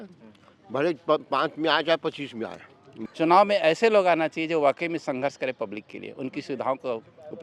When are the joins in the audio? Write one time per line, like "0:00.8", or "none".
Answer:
0:03.0